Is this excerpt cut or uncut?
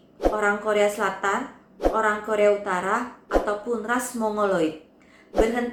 uncut